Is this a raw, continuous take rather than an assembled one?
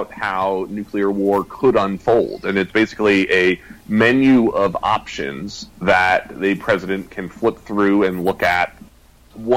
yes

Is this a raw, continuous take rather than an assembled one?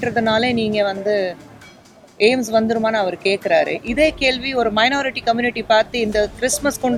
yes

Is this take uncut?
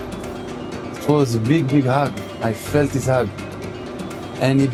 yes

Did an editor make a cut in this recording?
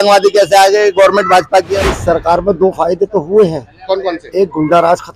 yes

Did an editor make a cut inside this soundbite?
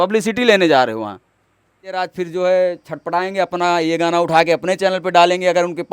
yes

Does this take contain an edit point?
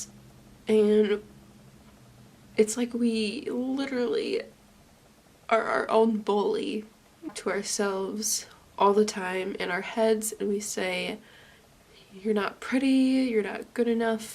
yes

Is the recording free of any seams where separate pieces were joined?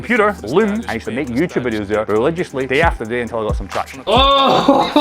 no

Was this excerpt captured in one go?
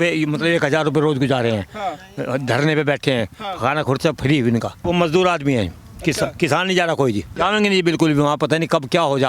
no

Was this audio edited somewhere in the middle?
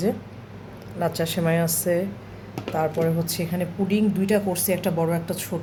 no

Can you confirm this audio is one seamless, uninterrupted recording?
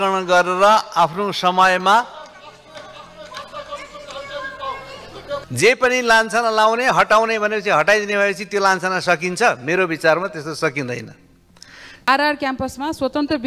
no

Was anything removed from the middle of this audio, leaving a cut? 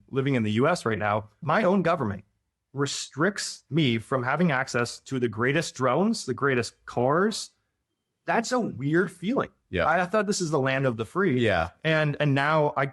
yes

